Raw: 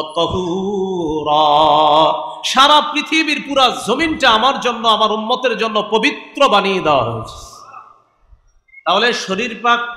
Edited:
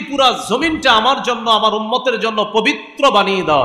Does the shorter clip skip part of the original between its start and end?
no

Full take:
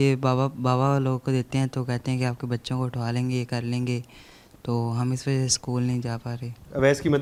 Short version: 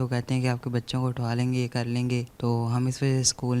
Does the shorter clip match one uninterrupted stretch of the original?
no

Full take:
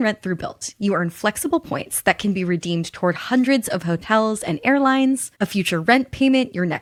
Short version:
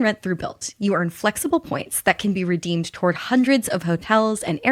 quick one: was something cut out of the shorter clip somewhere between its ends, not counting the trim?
no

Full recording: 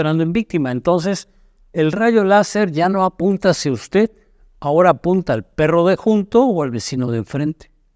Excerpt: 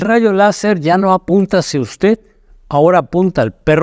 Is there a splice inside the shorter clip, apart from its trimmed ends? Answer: no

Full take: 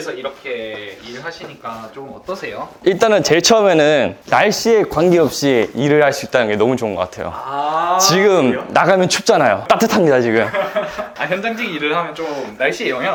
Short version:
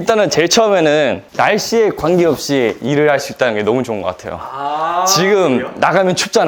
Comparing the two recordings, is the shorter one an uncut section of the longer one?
yes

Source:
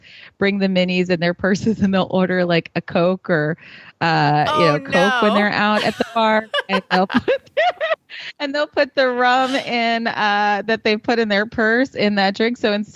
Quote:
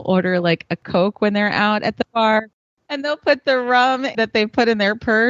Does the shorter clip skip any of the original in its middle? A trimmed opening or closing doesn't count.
yes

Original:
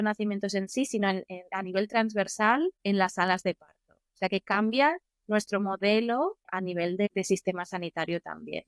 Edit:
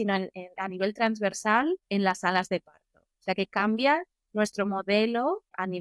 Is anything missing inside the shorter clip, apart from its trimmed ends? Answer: no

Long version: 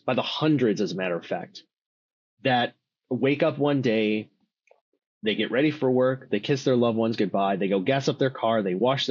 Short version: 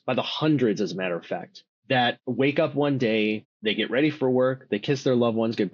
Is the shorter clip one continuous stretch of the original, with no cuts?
no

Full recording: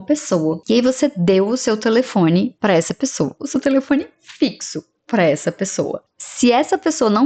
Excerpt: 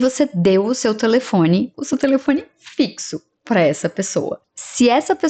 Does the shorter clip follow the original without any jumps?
no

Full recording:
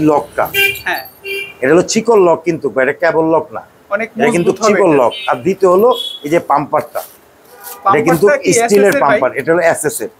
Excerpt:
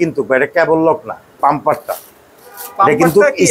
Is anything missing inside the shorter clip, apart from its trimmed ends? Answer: yes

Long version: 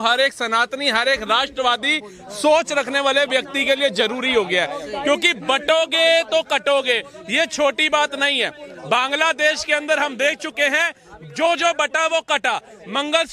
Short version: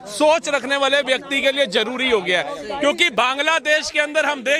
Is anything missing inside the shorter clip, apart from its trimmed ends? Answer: yes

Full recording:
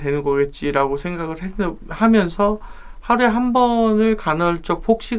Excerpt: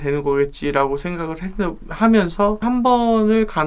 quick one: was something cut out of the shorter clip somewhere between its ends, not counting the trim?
yes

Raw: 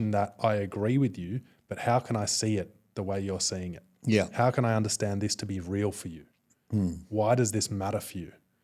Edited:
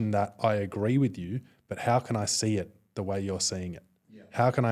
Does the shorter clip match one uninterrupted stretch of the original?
yes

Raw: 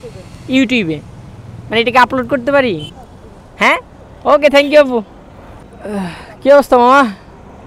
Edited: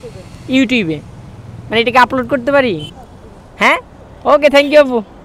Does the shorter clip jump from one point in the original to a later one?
no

